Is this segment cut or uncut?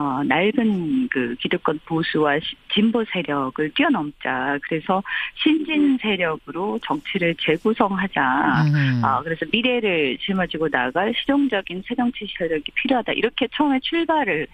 uncut